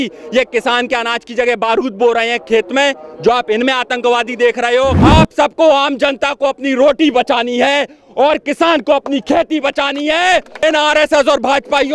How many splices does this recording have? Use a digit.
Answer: 2